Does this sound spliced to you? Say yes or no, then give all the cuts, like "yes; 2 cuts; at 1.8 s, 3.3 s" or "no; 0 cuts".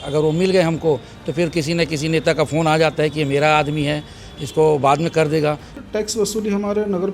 yes; 1 cut; at 5.8 s